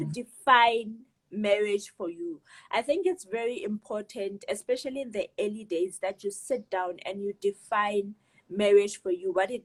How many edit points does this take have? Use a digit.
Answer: 0